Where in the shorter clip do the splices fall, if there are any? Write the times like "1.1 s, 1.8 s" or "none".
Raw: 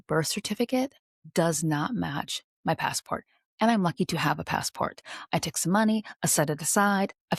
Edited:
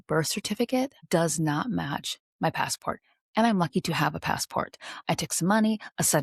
1.0 s